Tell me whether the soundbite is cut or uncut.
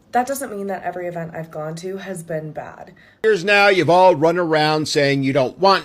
cut